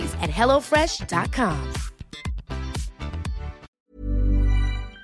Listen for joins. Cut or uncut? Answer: cut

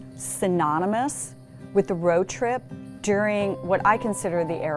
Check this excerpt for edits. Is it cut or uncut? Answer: uncut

